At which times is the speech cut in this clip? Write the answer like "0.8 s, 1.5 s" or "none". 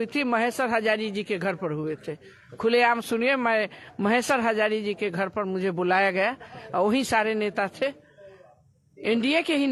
none